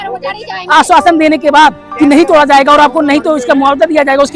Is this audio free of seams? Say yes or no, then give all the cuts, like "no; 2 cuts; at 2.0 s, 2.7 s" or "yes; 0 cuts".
no; 1 cut; at 1.8 s